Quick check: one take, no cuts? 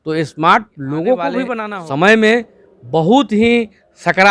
no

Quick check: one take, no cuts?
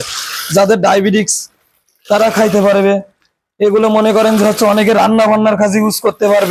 yes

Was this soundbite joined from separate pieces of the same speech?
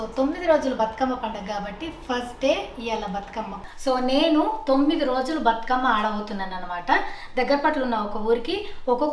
yes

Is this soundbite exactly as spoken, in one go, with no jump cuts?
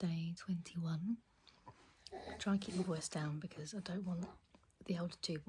yes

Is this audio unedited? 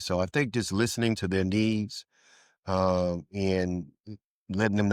yes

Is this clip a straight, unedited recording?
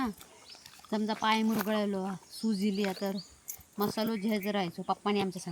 yes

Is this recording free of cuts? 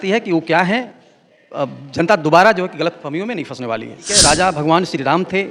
no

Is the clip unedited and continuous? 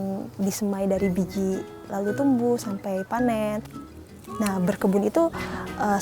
no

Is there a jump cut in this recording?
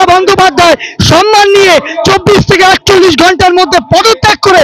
no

